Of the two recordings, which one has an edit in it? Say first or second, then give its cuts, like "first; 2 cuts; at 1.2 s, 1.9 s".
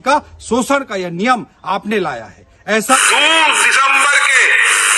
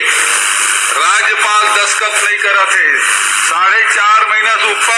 first; 1 cut; at 3.0 s